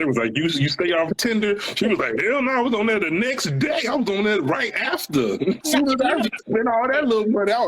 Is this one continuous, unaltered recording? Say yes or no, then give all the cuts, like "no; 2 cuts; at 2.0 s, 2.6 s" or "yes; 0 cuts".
no; 2 cuts; at 1.1 s, 5.6 s